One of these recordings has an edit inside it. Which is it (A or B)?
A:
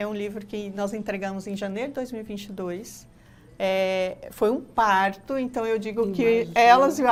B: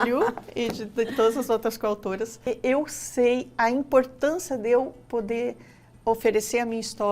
B